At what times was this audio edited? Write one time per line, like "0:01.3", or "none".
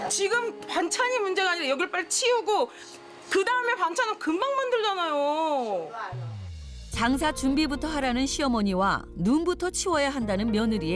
none

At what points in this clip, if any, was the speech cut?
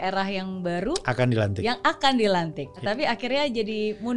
0:02.8

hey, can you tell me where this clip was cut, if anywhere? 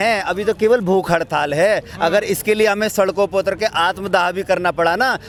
none

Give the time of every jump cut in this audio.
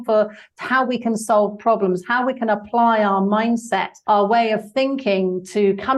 0:03.9

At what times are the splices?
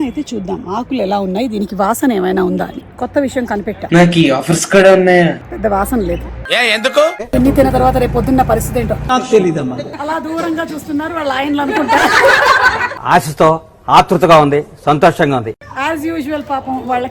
0:02.8
0:03.8
0:05.4
0:07.3
0:09.0
0:09.9
0:12.9

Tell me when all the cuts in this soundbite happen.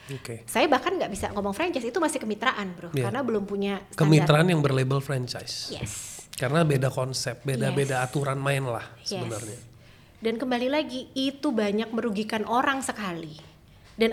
none

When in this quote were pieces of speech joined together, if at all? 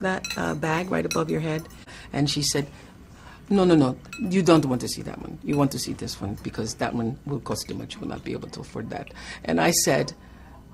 0:01.9

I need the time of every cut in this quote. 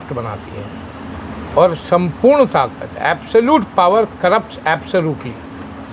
none

